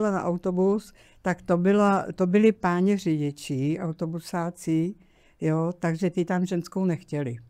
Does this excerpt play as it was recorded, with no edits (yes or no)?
yes